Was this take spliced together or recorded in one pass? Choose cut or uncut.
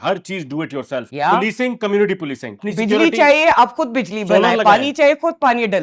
cut